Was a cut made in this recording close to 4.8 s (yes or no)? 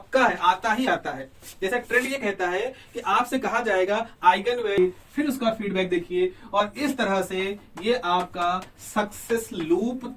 yes